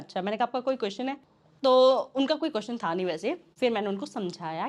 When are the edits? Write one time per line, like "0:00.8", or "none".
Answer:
0:03.5